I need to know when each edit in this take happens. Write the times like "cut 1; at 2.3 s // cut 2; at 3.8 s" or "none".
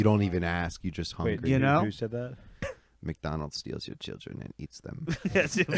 cut 1; at 2.7 s